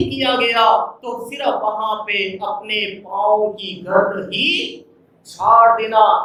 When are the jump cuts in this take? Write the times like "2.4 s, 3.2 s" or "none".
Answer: none